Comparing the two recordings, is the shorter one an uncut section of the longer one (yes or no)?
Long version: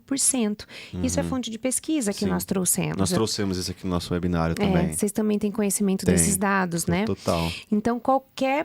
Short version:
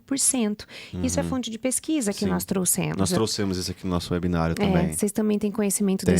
yes